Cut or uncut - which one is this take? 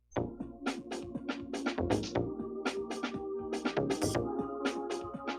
cut